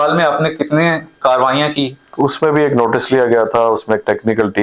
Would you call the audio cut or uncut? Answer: cut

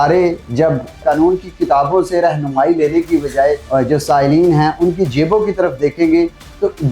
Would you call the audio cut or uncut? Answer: cut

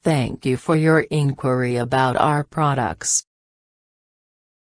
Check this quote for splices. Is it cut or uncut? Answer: uncut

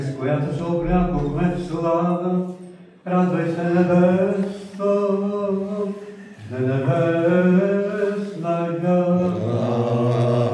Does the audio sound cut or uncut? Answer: cut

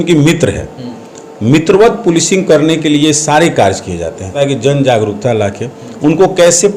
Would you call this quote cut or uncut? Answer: cut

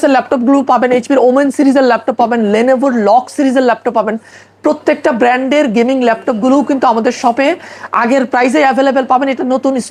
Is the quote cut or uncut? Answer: uncut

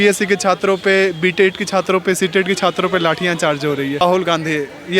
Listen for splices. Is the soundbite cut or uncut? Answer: cut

